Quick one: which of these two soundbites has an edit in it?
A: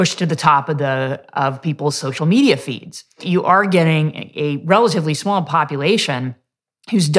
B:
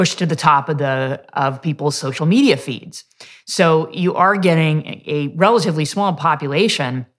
A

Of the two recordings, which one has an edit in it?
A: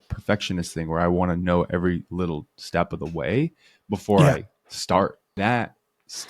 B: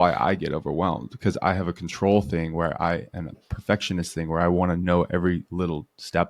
A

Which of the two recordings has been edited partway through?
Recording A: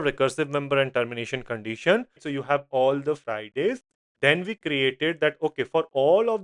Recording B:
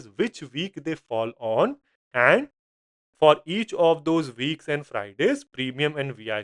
A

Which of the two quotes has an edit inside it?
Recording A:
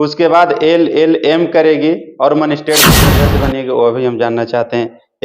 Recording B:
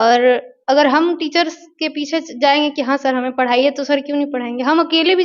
A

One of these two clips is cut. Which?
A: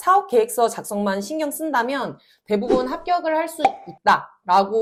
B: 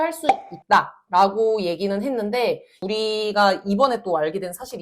B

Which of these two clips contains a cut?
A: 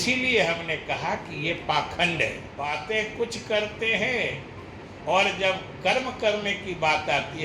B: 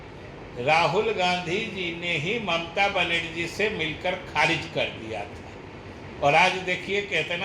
A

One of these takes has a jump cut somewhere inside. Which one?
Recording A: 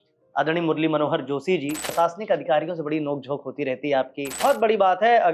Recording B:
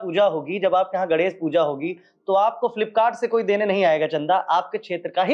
A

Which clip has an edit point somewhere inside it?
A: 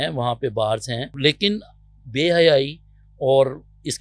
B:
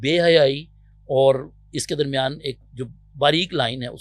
A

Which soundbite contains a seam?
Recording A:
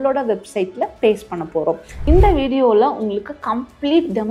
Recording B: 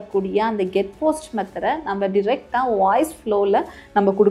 A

